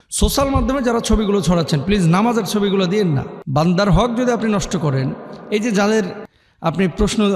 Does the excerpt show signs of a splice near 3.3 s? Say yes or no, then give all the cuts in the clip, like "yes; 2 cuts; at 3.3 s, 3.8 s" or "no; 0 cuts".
yes; 1 cut; at 3.3 s